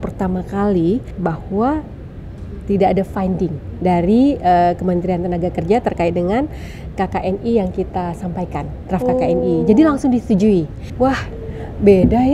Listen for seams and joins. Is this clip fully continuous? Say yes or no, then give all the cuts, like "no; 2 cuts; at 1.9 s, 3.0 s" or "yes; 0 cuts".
no; 2 cuts; at 1.1 s, 10.8 s